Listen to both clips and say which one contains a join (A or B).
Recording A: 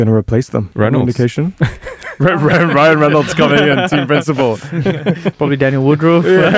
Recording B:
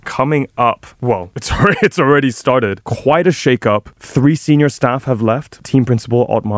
B